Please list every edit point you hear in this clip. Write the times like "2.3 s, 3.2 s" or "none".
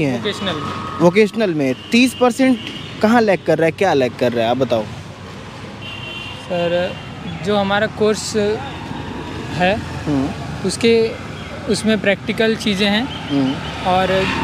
none